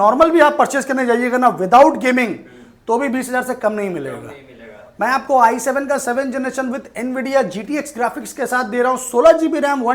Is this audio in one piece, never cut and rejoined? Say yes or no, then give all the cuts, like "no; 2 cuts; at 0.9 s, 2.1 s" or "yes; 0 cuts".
yes; 0 cuts